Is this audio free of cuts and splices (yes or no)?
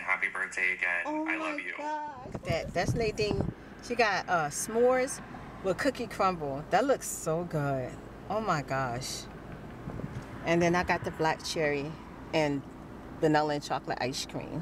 no